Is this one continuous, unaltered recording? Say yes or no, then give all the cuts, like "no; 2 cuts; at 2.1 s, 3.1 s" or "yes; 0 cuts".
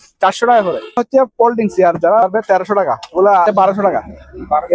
no; 3 cuts; at 1.0 s, 2.2 s, 3.4 s